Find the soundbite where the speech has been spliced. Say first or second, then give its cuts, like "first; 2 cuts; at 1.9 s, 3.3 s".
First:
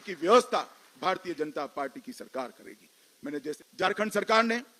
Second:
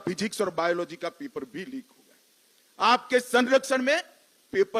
first; 1 cut; at 3.6 s